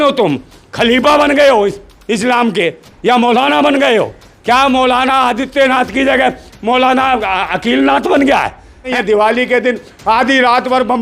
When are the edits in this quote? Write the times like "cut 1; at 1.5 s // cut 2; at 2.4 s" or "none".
cut 1; at 8.9 s